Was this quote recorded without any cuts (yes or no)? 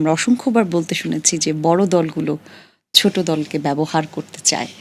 yes